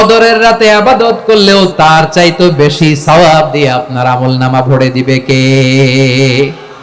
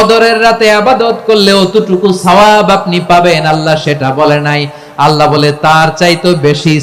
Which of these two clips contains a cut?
first; 1 cut; at 1.5 s

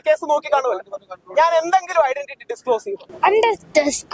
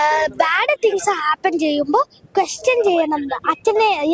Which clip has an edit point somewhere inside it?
first; 1 cut; at 3.0 s

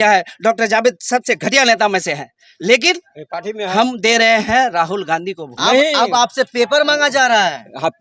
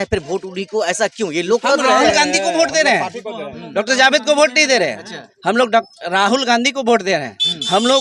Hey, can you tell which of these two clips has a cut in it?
first; 1 cut; at 5.6 s

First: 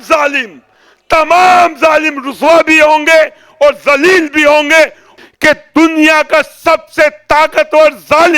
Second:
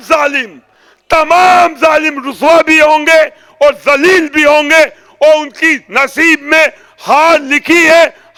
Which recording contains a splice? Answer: first; 1 cut; at 5.0 s

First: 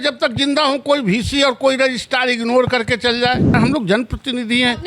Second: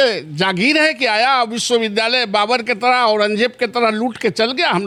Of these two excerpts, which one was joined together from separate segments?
first; 1 cut; at 3.5 s

